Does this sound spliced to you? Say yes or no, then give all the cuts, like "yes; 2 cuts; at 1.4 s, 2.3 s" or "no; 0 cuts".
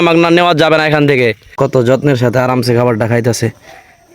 yes; 1 cut; at 1.3 s